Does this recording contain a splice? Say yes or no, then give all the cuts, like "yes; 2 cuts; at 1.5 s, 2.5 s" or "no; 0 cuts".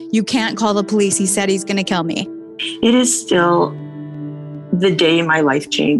yes; 1 cut; at 2.6 s